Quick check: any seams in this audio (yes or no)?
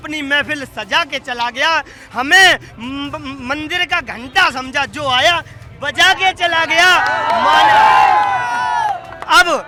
no